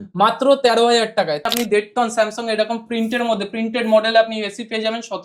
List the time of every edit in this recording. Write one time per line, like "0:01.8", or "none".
0:01.5